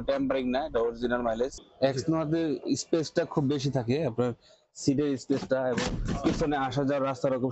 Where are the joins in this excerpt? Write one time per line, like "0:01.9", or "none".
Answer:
0:01.6